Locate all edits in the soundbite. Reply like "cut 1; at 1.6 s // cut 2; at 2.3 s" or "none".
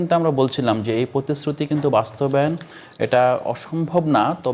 none